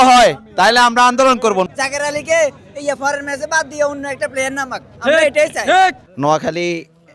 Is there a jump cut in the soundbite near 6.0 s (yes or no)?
yes